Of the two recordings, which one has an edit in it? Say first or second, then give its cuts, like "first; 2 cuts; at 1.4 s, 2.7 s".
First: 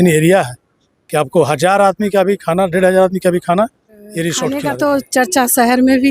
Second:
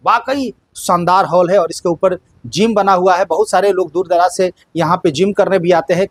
first; 1 cut; at 4.5 s